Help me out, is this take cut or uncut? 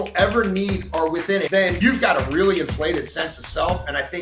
cut